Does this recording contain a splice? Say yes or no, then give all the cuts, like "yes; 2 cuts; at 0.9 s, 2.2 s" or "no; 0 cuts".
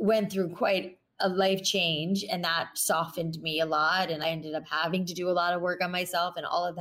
yes; 1 cut; at 4.2 s